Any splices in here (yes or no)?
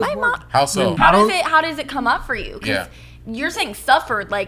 yes